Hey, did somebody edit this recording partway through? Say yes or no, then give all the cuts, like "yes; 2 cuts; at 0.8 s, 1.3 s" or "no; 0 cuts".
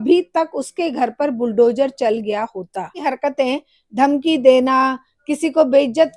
yes; 1 cut; at 3.0 s